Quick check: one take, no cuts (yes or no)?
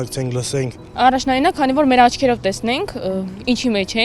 yes